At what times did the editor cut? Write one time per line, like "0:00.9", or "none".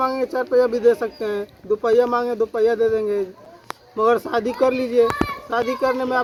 none